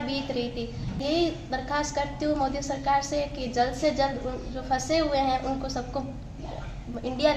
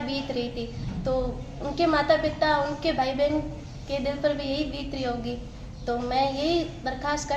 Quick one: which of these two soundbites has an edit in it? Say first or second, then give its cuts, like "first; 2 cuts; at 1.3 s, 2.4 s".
first; 1 cut; at 1.0 s